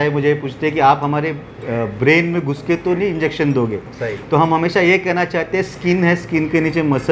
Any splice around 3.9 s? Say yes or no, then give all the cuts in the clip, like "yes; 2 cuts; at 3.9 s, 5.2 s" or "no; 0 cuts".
no; 0 cuts